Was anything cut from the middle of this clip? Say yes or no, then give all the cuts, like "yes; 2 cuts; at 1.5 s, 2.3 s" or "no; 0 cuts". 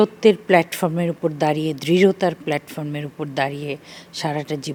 no; 0 cuts